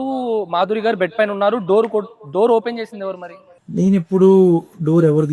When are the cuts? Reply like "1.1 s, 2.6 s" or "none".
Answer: none